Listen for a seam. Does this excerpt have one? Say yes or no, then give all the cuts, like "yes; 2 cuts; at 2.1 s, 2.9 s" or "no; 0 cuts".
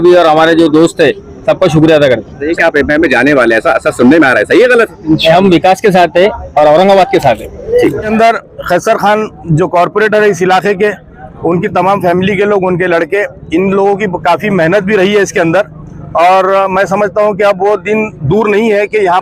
yes; 2 cuts; at 2.5 s, 8.1 s